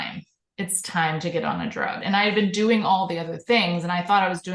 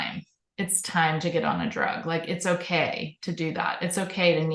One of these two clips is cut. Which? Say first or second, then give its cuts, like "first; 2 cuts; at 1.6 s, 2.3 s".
first; 1 cut; at 2.0 s